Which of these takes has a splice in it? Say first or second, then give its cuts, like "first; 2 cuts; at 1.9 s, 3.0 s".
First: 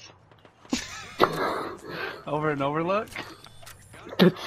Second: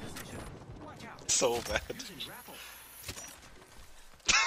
second; 1 cut; at 1.2 s